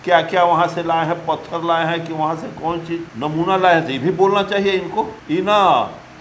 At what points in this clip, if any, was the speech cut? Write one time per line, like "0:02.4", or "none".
none